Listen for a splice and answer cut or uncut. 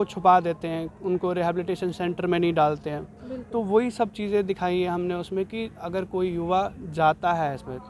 uncut